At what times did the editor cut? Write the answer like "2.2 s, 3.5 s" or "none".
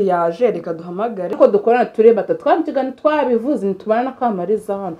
1.3 s

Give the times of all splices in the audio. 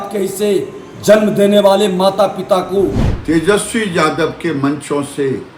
3.1 s

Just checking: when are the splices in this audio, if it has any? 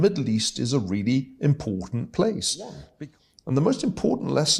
2.8 s

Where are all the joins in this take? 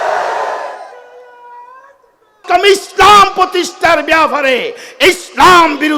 2.4 s

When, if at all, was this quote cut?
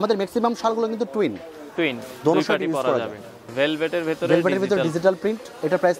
3.4 s

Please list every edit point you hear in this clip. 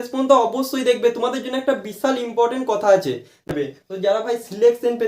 3.5 s

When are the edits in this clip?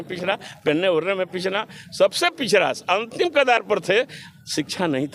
none

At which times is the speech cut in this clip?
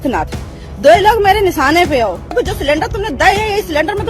2.3 s

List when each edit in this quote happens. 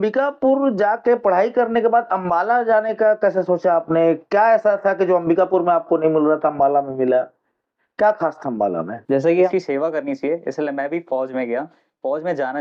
9.5 s

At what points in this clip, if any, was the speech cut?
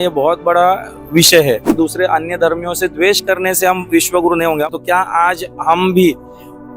1.7 s, 4.7 s

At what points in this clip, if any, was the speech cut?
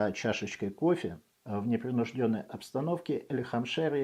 1.3 s

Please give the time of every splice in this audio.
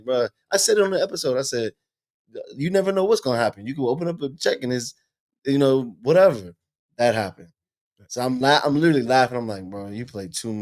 none

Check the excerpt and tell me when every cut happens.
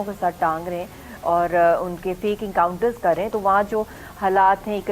3.3 s

